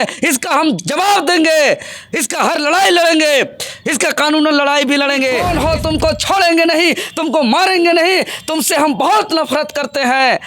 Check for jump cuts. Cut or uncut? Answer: cut